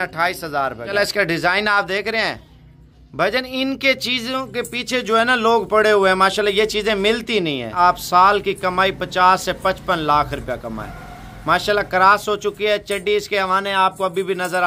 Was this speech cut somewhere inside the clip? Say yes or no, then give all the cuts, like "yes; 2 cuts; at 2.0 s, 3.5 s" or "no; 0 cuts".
yes; 2 cuts; at 0.9 s, 7.7 s